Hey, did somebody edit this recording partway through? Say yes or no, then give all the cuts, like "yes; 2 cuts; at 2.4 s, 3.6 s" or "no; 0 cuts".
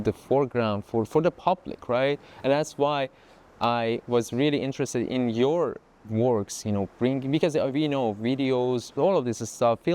no; 0 cuts